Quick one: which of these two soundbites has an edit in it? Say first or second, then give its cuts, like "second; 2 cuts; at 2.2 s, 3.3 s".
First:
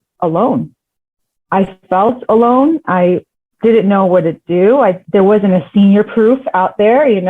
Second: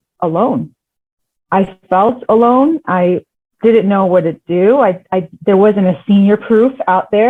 first; 1 cut; at 5.0 s